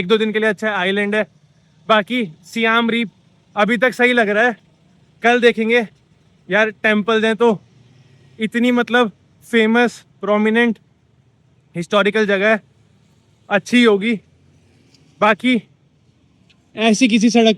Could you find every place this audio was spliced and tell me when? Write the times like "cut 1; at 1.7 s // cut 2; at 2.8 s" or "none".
none